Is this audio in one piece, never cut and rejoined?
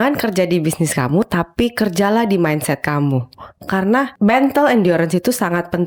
yes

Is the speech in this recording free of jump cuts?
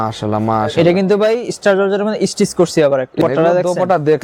no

